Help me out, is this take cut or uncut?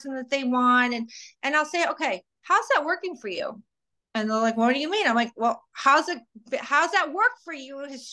uncut